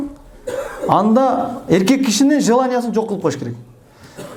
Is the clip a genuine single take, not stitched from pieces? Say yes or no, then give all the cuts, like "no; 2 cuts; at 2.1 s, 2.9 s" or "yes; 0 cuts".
yes; 0 cuts